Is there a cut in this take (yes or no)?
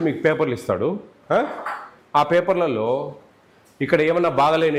no